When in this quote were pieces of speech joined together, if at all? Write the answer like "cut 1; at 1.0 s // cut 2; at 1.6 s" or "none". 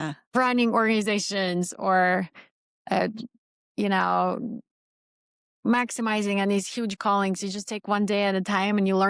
none